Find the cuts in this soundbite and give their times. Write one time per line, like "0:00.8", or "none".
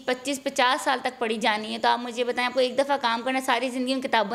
none